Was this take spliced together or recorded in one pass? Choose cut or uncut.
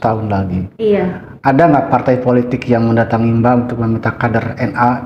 uncut